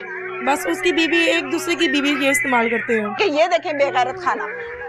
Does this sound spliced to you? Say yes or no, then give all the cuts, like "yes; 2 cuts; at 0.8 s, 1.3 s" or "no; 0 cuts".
yes; 1 cut; at 3.1 s